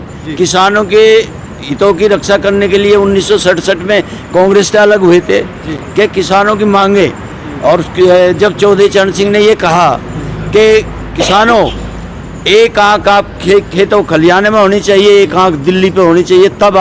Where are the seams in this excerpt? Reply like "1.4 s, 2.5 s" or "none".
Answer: none